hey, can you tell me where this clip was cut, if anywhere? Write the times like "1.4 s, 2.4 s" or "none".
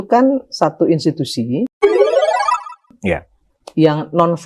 none